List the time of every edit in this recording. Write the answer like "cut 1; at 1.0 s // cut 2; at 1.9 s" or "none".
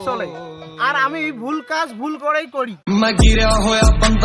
cut 1; at 2.8 s